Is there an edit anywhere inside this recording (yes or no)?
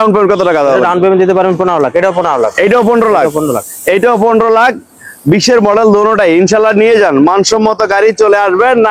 no